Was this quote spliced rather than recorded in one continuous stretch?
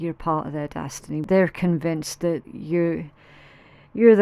yes; 2 cuts; at 1.3 s, 2.5 s

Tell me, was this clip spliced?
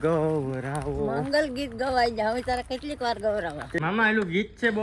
yes; 1 cut; at 3.7 s

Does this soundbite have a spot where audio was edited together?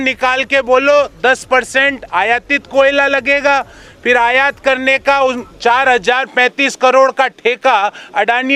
no; 0 cuts

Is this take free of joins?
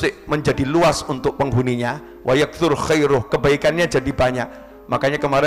yes; 0 cuts

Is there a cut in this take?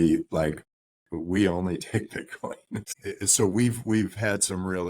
yes; 1 cut; at 2.8 s

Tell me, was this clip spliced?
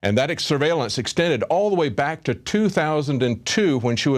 yes; 1 cut; at 2.1 s

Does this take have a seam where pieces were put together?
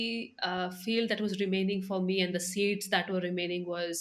no; 0 cuts

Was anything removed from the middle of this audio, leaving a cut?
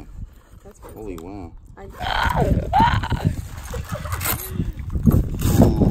yes; 1 cut; at 1.9 s

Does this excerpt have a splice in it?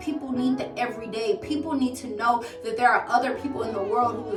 no; 0 cuts

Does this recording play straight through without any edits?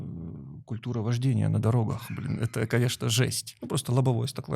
no; 1 cut; at 3.5 s

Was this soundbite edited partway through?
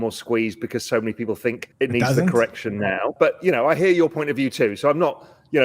yes; 2 cuts; at 1.7 s, 3.1 s

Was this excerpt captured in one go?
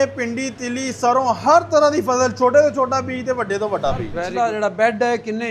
no; 1 cut; at 4.2 s

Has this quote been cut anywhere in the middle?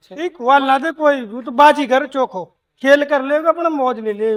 no; 0 cuts

